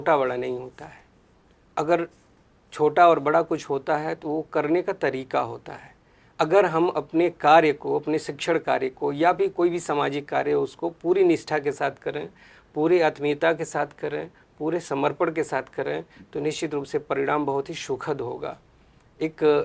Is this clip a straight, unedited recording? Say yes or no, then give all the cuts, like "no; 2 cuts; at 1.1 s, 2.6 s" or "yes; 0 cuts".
yes; 0 cuts